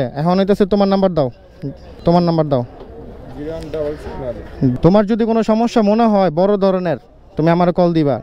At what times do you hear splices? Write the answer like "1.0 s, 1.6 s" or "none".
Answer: 2.0 s, 4.7 s